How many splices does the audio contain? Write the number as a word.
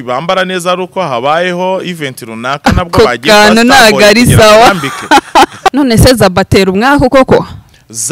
one